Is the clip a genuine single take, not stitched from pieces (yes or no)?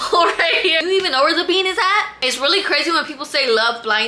no